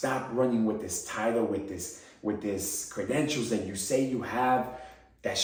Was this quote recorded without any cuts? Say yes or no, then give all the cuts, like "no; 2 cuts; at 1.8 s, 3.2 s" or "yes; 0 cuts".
yes; 0 cuts